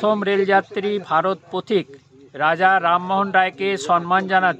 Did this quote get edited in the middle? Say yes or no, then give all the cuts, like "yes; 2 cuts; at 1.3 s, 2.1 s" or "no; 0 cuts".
no; 0 cuts